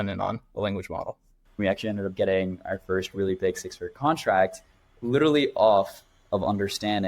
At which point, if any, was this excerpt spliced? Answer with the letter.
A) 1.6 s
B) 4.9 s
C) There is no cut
A